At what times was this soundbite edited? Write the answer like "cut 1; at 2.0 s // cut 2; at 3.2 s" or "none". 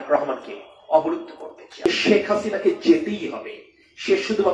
cut 1; at 1.7 s